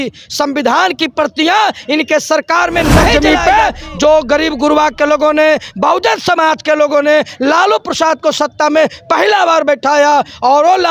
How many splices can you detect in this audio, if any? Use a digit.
1